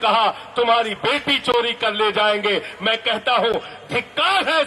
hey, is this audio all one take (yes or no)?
yes